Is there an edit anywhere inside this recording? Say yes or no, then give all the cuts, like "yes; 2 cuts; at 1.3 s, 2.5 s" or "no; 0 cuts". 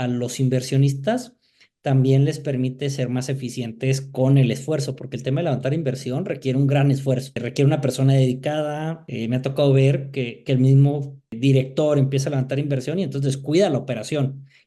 yes; 2 cuts; at 7.4 s, 9.0 s